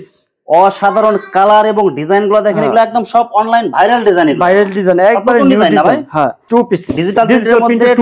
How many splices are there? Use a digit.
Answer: 1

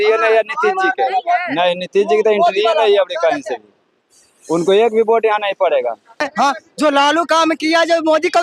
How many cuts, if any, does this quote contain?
1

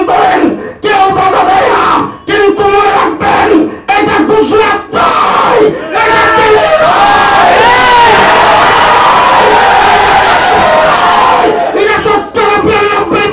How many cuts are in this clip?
0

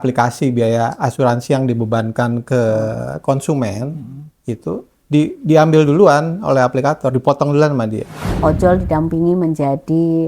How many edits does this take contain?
1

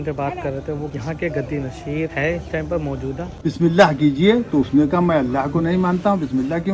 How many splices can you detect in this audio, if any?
1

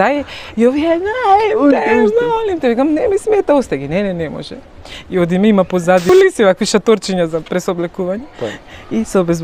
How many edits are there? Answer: 1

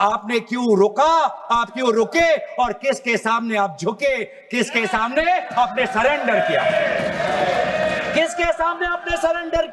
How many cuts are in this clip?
0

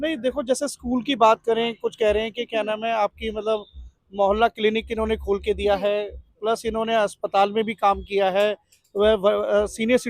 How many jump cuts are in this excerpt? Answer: 0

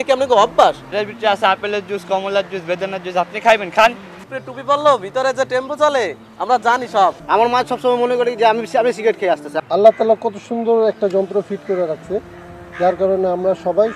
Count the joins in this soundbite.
4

